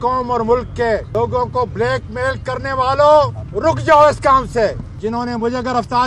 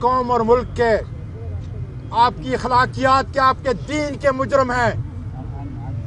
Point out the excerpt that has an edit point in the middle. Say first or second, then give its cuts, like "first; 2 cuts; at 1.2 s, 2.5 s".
first; 3 cuts; at 1.1 s, 3.4 s, 4.9 s